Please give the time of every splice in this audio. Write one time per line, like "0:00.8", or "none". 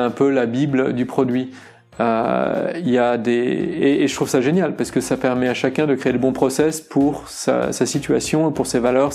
none